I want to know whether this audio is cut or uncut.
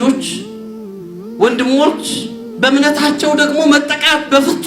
uncut